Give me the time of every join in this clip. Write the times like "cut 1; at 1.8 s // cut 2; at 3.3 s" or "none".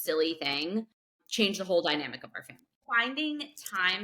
cut 1; at 1.2 s // cut 2; at 2.8 s

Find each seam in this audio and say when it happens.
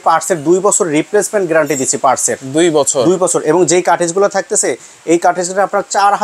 none

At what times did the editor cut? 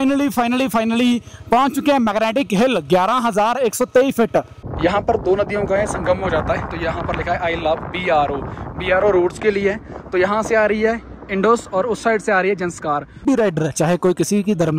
cut 1; at 4.6 s // cut 2; at 13.2 s

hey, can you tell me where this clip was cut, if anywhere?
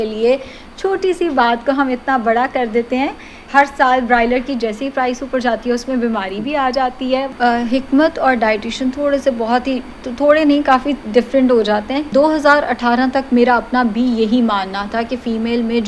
cut 1; at 3.4 s // cut 2; at 7.3 s // cut 3; at 12.1 s

